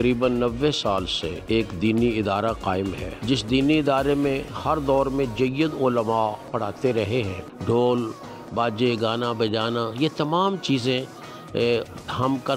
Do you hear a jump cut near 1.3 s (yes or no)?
yes